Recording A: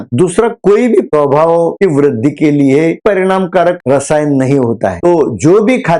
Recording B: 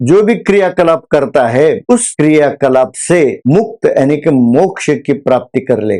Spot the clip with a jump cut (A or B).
A